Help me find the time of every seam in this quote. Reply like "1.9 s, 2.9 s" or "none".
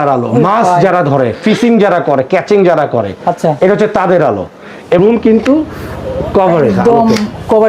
5.0 s